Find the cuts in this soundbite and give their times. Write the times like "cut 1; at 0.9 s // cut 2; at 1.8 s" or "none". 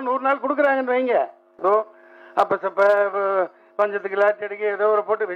cut 1; at 1.5 s